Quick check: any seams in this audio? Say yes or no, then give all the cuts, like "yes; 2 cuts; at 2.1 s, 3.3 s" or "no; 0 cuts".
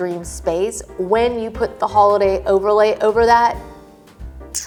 no; 0 cuts